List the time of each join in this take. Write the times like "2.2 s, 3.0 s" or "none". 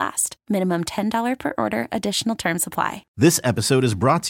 3.0 s